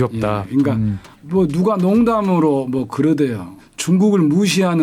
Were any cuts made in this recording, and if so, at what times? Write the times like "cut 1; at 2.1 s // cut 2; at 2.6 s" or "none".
none